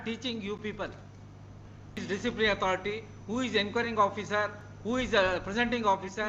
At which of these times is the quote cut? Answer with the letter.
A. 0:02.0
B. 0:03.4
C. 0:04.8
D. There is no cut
A